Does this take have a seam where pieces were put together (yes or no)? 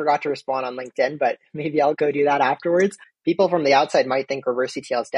yes